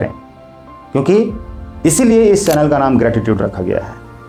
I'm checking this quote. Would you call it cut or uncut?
uncut